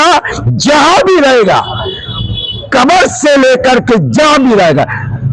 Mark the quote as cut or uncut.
uncut